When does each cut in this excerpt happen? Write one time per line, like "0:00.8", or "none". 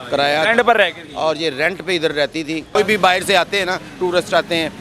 0:02.8